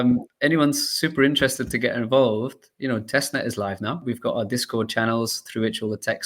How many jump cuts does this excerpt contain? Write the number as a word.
one